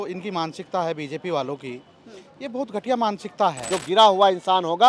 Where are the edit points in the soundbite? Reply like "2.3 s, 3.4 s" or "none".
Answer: 3.7 s